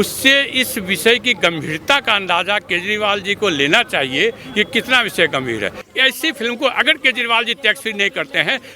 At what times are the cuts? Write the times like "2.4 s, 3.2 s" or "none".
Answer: 5.8 s